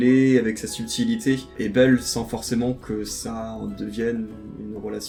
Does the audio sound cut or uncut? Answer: uncut